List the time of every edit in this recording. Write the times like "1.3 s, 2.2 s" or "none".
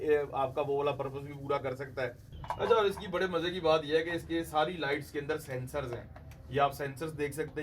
2.3 s